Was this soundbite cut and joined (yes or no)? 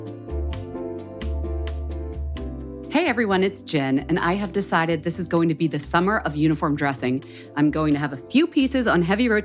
yes